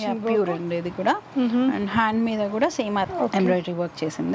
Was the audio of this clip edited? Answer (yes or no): yes